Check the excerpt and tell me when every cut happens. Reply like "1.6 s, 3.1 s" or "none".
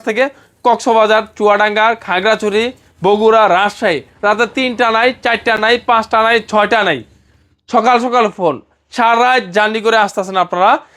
none